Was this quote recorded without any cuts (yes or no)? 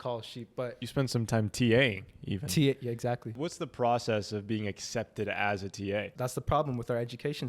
no